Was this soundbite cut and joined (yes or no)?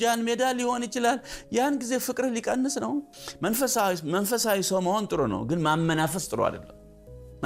yes